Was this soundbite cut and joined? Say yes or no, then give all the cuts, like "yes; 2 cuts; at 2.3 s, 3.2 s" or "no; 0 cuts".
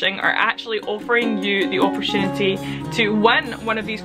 no; 0 cuts